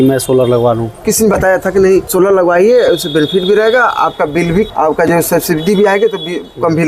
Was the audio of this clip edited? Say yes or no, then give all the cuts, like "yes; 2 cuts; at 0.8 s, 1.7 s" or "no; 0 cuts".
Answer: yes; 3 cuts; at 1.1 s, 2.1 s, 4.7 s